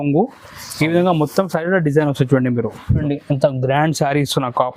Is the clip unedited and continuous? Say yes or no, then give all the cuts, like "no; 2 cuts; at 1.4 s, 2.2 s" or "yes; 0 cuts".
no; 1 cut; at 3.0 s